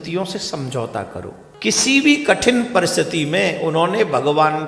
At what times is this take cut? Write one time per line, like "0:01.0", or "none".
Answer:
0:01.4

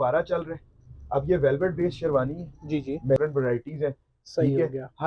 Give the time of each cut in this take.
0:03.2

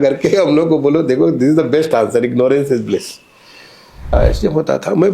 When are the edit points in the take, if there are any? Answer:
0:04.1

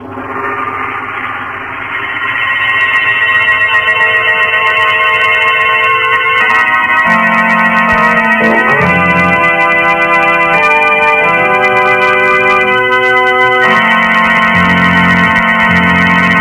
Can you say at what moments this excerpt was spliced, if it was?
0:05.8

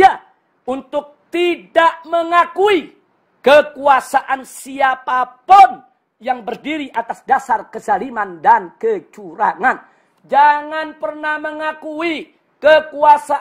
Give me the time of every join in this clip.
none

